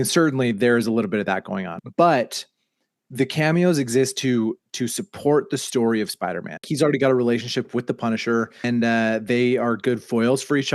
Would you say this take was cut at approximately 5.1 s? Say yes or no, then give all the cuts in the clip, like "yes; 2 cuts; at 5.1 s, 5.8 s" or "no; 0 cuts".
no; 3 cuts; at 1.7 s, 6.7 s, 8.6 s